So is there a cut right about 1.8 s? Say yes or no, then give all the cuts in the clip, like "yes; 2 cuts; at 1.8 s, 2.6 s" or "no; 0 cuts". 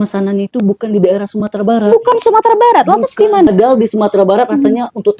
no; 1 cut; at 3.5 s